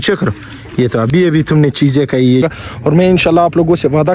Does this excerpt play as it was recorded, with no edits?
no; 1 cut; at 2.5 s

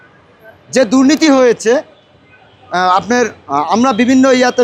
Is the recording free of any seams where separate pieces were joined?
yes; 0 cuts

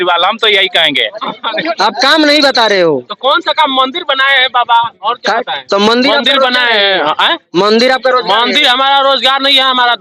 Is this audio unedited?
no; 1 cut; at 1.4 s

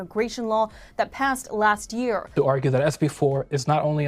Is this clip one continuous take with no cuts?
no; 1 cut; at 2.3 s

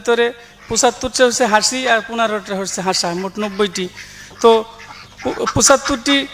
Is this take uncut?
yes; 0 cuts

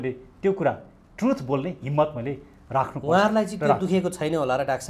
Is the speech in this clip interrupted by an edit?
no; 0 cuts

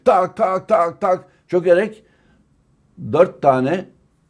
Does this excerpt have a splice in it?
no; 0 cuts

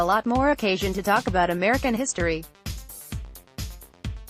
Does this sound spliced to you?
yes; 1 cut; at 2.5 s

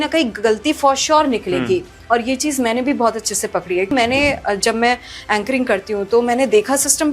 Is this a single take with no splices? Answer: no; 1 cut; at 3.9 s

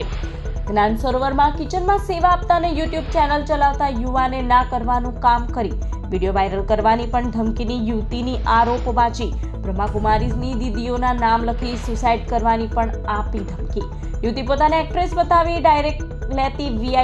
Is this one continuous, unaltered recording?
yes; 0 cuts

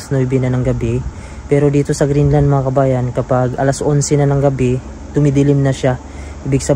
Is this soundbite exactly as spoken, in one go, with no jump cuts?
yes; 0 cuts

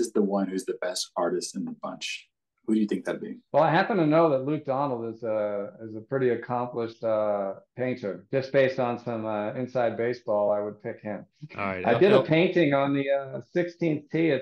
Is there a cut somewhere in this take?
no; 0 cuts

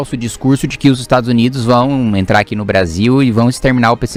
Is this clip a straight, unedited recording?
yes; 0 cuts

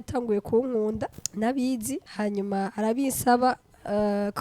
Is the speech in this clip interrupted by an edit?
yes; 2 cuts; at 1.2 s, 2.1 s

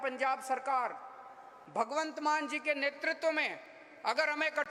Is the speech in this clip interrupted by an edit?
no; 0 cuts

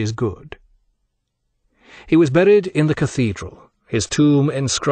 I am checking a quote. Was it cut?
no; 0 cuts

